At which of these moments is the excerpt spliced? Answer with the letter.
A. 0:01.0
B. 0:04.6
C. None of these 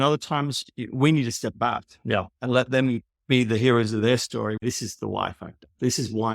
B